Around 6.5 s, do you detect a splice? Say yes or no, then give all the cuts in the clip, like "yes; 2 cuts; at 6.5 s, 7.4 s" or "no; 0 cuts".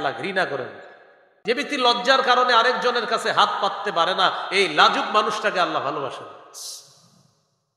no; 1 cut; at 1.3 s